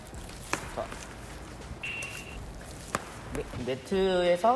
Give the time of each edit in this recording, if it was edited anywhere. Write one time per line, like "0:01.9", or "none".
0:03.5